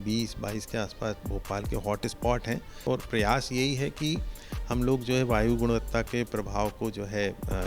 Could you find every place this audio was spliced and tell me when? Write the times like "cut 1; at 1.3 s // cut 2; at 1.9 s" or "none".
cut 1; at 2.8 s